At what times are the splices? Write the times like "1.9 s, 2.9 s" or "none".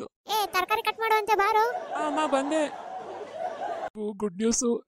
3.9 s